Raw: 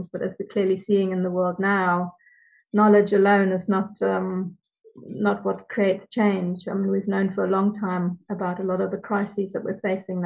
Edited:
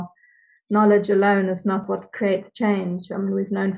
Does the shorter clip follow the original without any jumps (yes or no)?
no